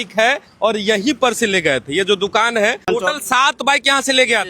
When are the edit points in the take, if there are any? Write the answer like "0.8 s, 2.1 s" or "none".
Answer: 2.9 s